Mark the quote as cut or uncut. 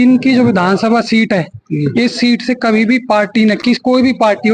uncut